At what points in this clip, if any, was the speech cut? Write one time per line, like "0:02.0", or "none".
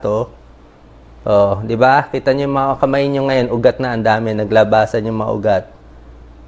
none